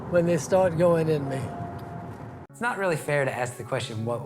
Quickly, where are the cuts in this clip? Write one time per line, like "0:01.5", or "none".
0:02.5